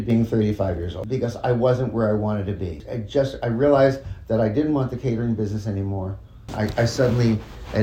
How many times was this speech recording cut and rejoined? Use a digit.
3